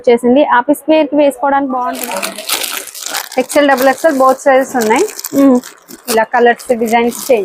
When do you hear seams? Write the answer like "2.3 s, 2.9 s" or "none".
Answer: 1.8 s